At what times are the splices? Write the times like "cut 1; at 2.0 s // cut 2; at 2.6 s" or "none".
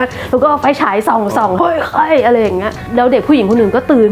cut 1; at 1.5 s // cut 2; at 2.8 s